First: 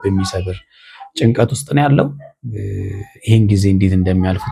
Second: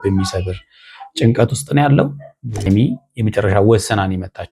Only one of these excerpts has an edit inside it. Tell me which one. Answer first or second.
second